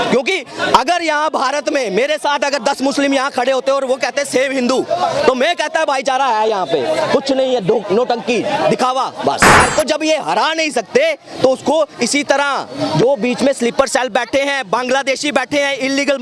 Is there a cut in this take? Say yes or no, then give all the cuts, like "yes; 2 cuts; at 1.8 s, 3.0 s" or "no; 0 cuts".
yes; 1 cut; at 9.6 s